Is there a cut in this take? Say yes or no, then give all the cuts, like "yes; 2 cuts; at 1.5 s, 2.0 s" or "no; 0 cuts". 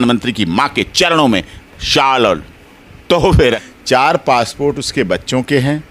yes; 1 cut; at 3.6 s